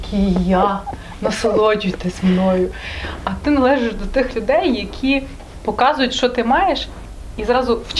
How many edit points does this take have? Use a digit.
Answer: 0